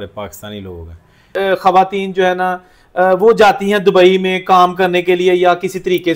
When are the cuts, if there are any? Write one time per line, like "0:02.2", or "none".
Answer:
0:01.3